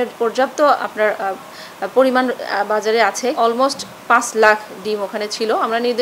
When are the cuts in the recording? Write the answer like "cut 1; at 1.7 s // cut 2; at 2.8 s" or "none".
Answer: cut 1; at 3.3 s